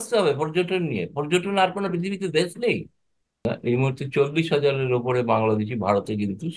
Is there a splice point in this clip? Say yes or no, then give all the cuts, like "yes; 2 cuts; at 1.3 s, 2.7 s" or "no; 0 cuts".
yes; 1 cut; at 3.4 s